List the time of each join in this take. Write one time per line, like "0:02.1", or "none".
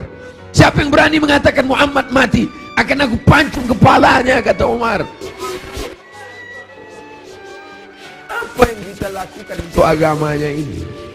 0:05.3